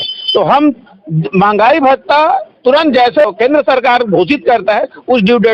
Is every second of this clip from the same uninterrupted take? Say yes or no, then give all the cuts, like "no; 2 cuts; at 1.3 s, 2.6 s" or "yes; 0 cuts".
no; 1 cut; at 3.3 s